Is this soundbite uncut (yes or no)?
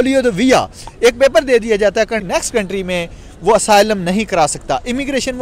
no